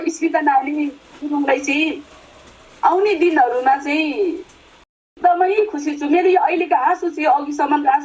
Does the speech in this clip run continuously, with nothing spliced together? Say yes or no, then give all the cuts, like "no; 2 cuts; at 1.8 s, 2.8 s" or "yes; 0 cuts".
no; 1 cut; at 4.9 s